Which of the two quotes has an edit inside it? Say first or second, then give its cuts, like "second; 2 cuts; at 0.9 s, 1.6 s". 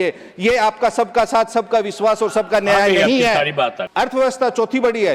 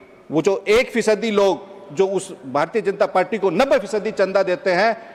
first; 1 cut; at 3.8 s